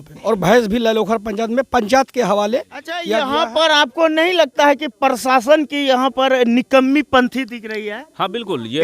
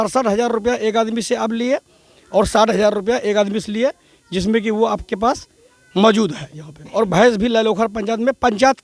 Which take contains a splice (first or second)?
first